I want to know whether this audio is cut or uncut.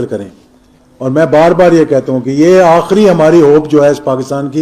uncut